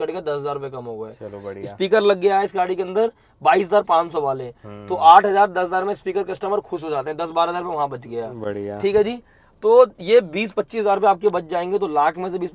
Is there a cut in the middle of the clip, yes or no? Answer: no